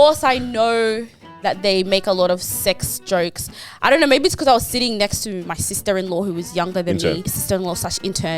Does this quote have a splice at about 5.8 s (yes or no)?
no